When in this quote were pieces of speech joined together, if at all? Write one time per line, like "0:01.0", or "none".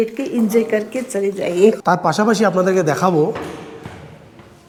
none